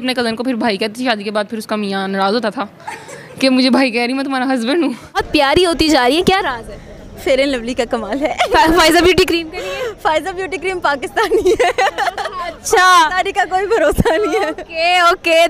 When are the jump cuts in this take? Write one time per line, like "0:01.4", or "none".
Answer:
0:05.2